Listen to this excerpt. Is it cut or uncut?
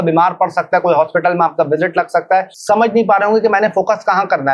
cut